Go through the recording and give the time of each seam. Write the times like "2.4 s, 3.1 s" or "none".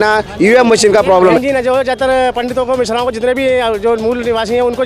1.4 s

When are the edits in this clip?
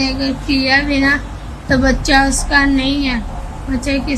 none

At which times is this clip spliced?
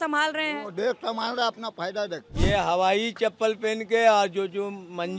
2.3 s

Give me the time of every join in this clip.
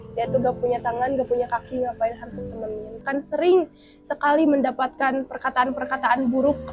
3.0 s

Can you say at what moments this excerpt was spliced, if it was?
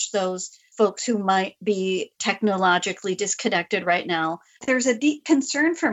4.6 s

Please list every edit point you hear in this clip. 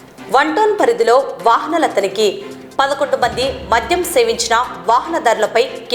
none

